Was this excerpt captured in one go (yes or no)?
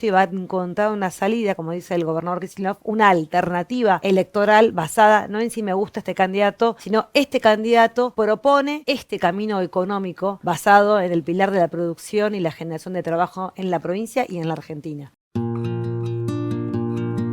no